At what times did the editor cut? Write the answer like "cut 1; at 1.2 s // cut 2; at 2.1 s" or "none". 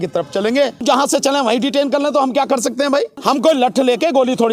cut 1; at 0.8 s // cut 2; at 3.1 s